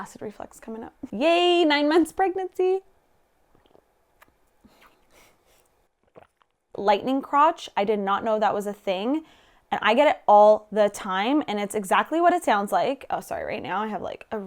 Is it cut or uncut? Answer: cut